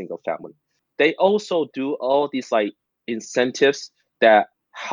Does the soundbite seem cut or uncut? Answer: uncut